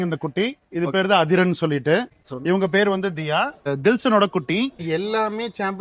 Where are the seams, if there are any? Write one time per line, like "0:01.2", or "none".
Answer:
0:02.2
0:03.7
0:04.8